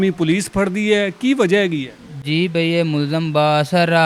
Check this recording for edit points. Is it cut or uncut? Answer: uncut